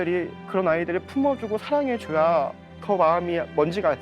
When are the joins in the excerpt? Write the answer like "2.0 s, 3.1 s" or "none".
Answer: 2.7 s